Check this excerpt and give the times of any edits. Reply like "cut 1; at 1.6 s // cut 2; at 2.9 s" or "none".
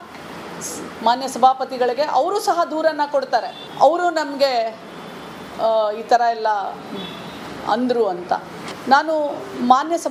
none